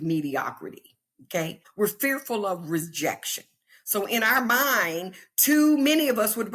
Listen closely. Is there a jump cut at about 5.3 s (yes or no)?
no